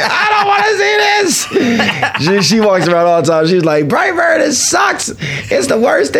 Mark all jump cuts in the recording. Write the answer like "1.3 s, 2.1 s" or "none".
none